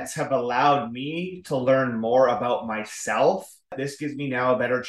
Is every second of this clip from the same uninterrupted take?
no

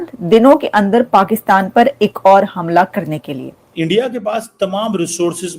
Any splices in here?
yes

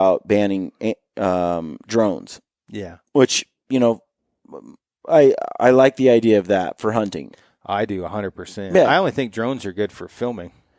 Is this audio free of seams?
yes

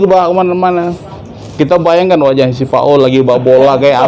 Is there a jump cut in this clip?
no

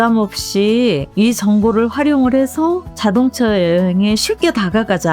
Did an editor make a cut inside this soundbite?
yes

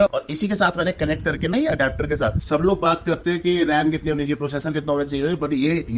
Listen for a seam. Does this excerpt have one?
yes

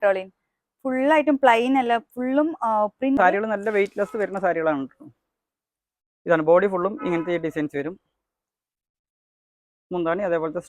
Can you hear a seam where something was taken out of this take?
yes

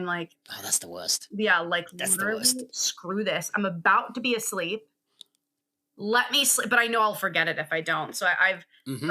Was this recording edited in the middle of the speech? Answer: no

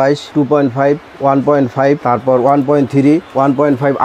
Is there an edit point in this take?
no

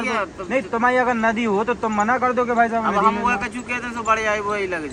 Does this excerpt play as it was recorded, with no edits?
yes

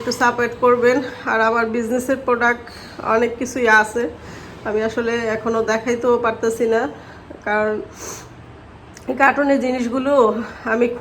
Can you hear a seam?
no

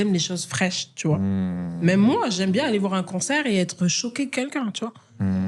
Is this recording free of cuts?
yes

